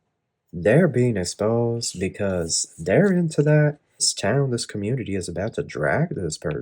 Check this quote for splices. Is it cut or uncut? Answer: cut